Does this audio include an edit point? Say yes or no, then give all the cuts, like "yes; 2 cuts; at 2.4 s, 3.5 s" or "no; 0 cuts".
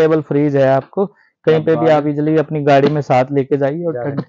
no; 0 cuts